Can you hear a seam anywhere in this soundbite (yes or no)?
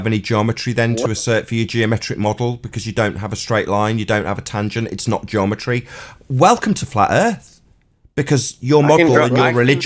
no